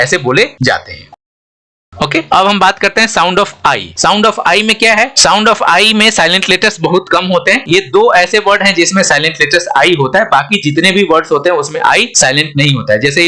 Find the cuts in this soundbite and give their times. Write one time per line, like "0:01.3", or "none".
none